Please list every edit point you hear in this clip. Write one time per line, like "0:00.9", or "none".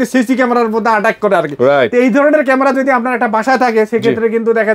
none